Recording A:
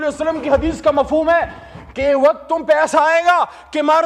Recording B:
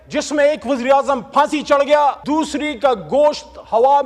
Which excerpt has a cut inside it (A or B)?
B